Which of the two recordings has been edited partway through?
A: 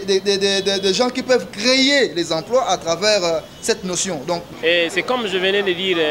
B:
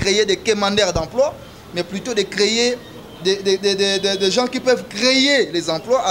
A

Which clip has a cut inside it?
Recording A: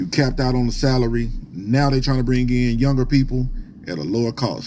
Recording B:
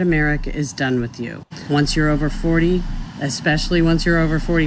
B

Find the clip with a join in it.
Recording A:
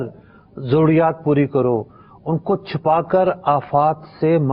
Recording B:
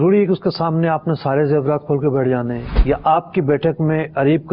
B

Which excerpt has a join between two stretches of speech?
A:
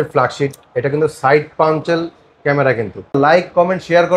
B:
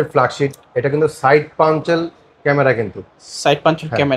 A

